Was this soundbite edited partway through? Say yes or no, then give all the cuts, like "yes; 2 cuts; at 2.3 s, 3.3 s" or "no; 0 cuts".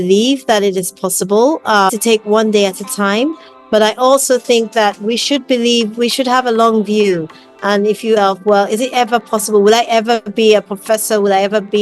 yes; 2 cuts; at 1.9 s, 8.2 s